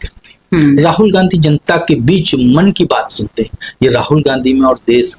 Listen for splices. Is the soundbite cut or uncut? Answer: uncut